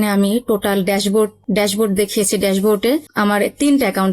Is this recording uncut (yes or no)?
no